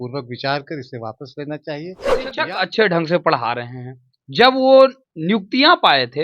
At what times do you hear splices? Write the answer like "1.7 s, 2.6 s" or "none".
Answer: 2.1 s